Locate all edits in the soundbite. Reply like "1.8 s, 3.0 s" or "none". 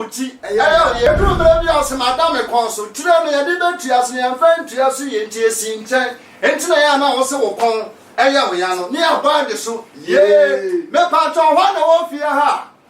1.1 s